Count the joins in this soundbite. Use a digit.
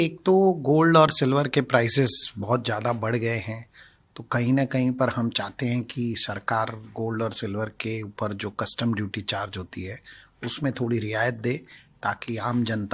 0